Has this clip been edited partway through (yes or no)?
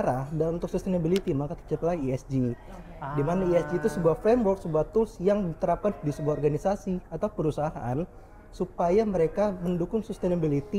no